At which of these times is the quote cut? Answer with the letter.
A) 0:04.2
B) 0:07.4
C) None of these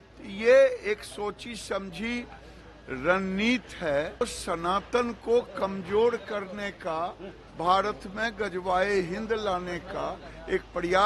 A